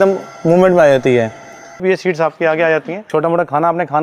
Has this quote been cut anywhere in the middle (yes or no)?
yes